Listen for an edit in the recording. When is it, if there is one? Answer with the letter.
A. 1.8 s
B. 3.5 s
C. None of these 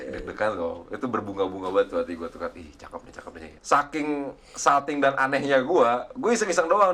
B